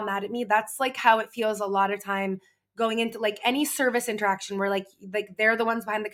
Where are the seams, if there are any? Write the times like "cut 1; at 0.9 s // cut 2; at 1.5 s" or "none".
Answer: none